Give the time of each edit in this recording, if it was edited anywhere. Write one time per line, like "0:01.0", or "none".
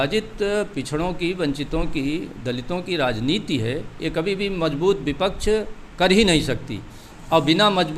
none

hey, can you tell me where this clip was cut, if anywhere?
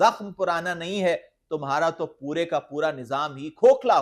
none

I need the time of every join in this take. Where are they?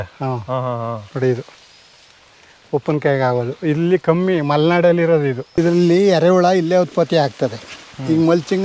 0:05.5

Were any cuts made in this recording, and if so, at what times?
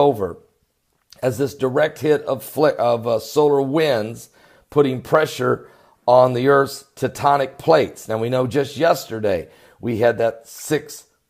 0:08.4

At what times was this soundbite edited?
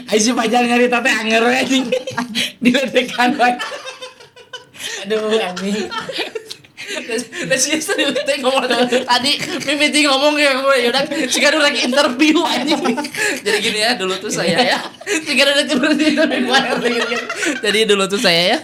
none

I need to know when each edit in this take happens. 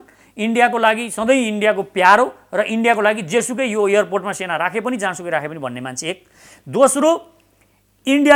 none

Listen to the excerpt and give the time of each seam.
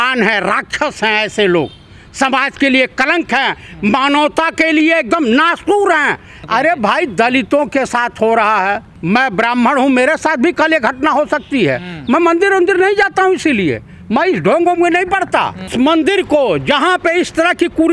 0:06.3
0:08.9
0:15.7

